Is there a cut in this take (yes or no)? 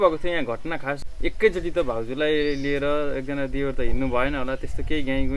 yes